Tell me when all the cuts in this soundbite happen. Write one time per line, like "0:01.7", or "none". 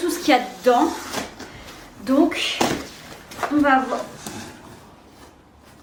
none